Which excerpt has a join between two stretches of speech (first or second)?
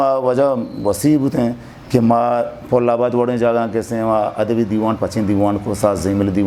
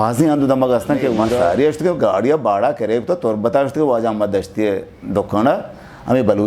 second